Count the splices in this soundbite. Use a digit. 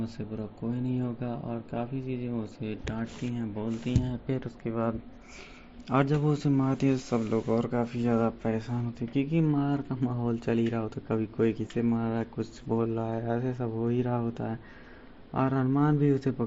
1